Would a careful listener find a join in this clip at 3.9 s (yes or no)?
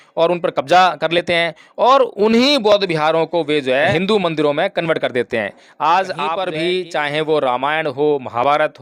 yes